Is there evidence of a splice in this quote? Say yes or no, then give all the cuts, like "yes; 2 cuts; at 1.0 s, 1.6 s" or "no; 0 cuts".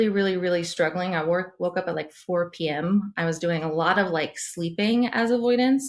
no; 0 cuts